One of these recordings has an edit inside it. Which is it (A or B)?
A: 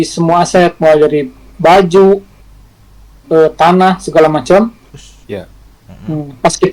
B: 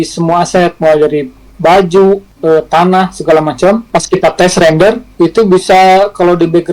B